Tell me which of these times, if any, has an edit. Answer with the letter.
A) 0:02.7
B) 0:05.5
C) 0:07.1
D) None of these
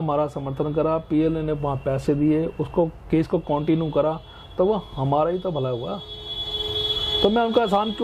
D